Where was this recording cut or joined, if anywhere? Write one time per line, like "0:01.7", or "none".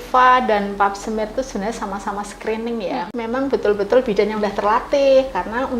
0:03.1